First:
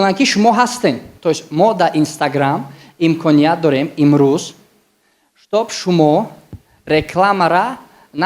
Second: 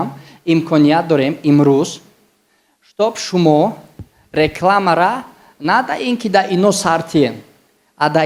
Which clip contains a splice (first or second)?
first